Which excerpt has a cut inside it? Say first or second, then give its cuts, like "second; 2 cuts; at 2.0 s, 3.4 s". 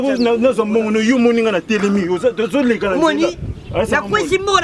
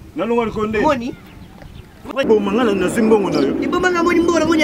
second; 1 cut; at 2.2 s